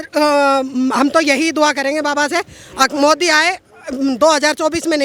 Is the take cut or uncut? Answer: uncut